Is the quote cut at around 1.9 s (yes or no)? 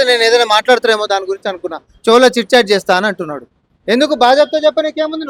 no